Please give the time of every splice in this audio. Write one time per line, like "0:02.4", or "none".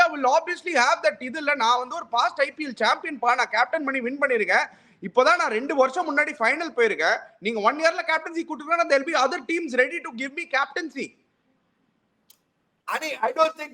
none